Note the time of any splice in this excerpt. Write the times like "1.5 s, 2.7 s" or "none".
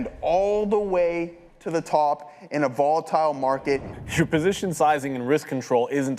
3.9 s